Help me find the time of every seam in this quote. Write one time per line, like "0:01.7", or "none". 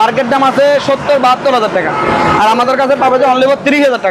none